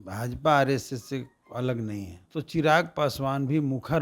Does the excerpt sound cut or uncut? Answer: cut